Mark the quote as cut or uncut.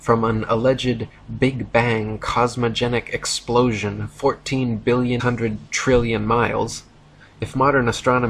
uncut